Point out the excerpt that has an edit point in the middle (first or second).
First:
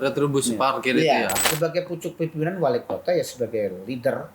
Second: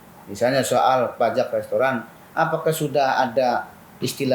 first